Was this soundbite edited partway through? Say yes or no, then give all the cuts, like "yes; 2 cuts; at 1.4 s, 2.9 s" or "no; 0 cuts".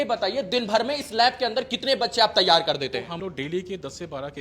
yes; 1 cut; at 3.2 s